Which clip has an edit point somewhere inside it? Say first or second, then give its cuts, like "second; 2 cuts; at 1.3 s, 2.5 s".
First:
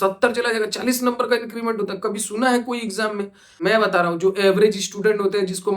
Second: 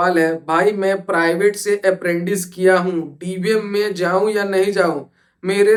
first; 1 cut; at 3.5 s